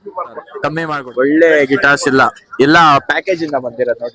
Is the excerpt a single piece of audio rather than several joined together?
no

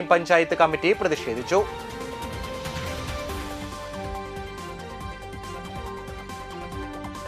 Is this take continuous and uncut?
yes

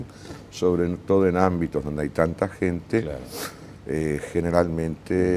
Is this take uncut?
no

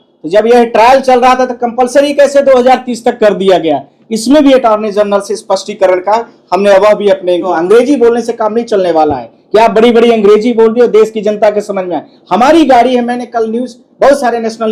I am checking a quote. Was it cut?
yes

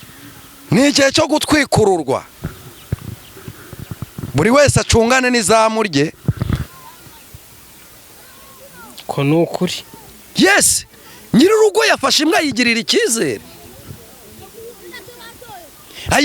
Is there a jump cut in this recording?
yes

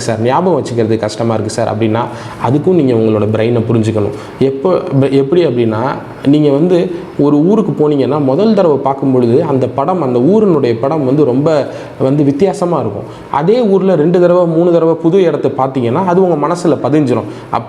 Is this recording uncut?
yes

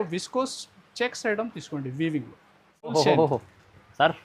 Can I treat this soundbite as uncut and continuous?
no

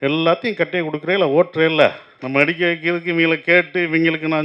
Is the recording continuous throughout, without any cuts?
no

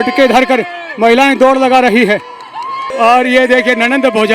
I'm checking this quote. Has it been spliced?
yes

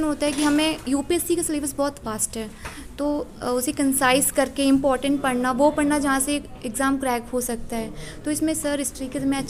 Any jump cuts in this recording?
no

